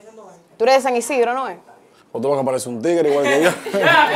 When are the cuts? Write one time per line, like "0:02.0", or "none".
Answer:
none